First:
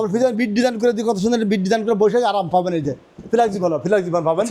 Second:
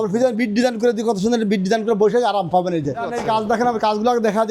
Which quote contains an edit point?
second; 1 cut; at 3.1 s

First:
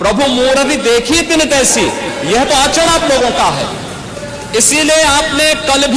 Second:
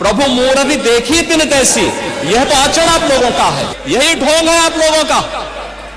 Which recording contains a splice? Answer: second; 1 cut; at 3.7 s

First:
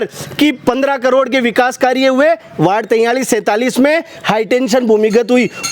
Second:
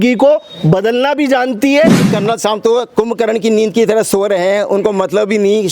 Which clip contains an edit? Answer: second; 1 cut; at 2.1 s

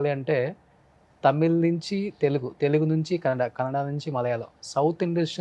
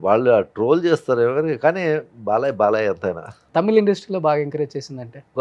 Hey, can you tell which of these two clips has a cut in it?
second; 1 cut; at 3.3 s

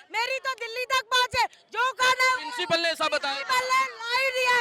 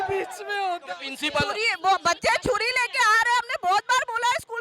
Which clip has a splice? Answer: second; 1 cut; at 1.5 s

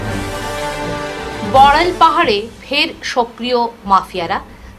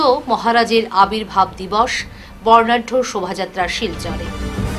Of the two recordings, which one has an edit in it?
first; 1 cut; at 1.0 s

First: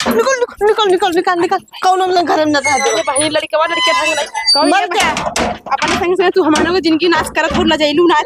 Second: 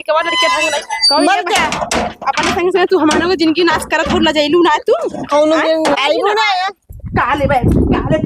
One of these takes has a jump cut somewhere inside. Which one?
second; 1 cut; at 6.0 s

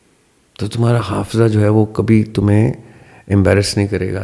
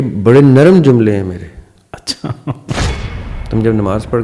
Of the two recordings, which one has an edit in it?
second; 1 cut; at 3.2 s

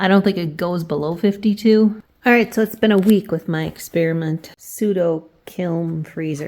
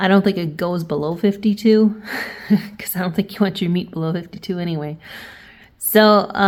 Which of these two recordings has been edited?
first; 2 cuts; at 2.1 s, 4.5 s

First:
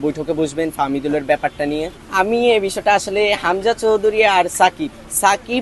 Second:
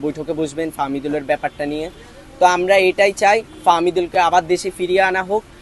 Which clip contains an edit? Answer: first; 1 cut; at 2.0 s

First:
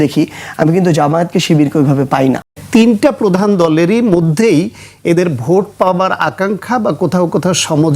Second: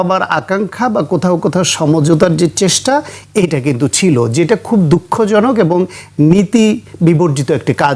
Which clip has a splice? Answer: first; 1 cut; at 2.5 s

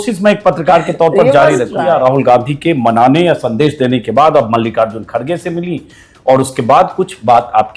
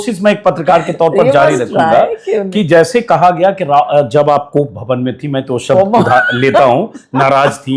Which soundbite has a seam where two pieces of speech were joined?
first; 1 cut; at 1.4 s

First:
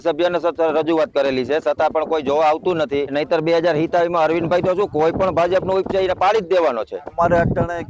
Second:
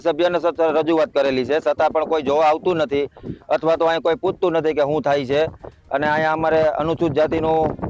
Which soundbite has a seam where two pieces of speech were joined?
first; 2 cuts; at 3.1 s, 7.1 s

